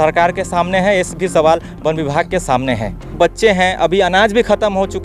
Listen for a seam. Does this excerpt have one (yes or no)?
yes